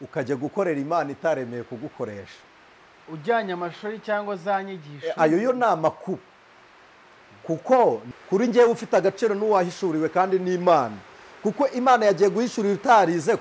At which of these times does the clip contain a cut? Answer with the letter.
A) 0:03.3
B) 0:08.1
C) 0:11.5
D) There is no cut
B